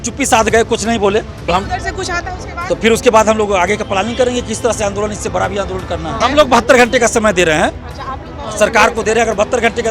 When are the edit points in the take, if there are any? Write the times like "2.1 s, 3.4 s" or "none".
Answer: 1.5 s, 6.2 s